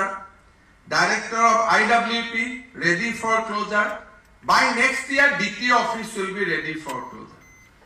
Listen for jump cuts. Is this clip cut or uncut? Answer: uncut